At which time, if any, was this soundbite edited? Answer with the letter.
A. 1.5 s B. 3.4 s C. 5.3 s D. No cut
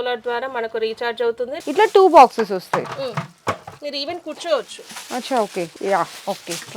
A